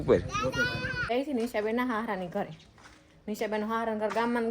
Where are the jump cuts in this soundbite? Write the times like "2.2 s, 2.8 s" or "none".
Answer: 1.0 s